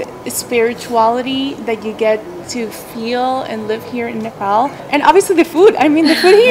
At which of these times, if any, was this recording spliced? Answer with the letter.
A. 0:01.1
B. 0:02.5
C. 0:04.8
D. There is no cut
C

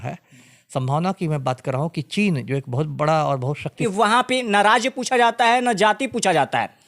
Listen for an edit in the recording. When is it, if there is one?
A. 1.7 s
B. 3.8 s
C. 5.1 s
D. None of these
B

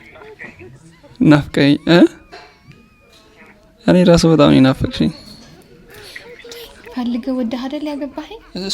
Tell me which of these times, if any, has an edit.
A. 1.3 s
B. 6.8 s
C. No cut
B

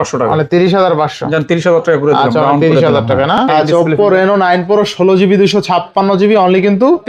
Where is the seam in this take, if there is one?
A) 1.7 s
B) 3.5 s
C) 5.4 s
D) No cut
B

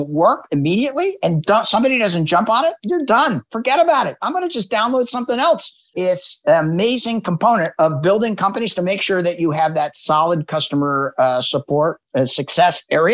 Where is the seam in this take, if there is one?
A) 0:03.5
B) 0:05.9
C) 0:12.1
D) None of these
B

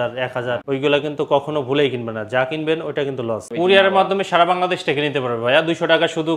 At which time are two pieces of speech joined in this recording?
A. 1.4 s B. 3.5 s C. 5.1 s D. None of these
B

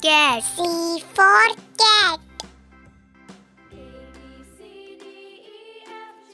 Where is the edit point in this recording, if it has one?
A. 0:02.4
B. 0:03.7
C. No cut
A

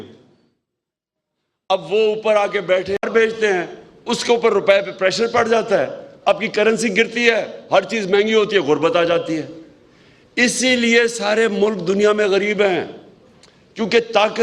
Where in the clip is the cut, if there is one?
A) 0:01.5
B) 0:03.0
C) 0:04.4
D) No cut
B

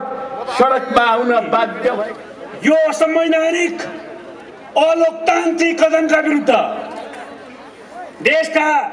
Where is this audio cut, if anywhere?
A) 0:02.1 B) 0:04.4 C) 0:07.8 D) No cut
A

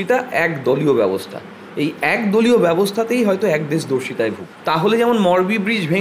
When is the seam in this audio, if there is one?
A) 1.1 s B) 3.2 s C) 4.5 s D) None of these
C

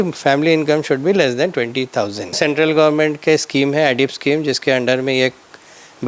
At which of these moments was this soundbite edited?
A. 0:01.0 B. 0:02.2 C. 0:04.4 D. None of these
B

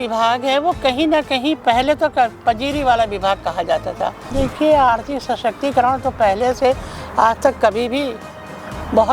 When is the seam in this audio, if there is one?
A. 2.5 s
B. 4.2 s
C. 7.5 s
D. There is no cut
B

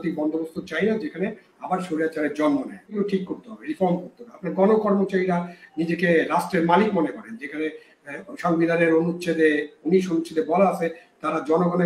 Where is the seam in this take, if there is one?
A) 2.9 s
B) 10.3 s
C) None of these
A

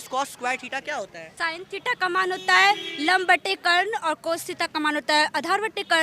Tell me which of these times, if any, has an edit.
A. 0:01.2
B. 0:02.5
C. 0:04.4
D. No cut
A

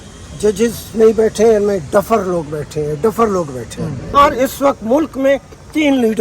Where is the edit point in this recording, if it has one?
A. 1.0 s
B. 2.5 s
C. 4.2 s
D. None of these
C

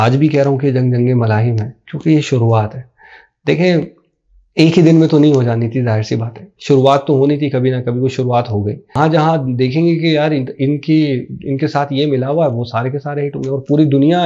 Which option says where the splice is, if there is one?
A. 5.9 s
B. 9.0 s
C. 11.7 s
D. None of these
B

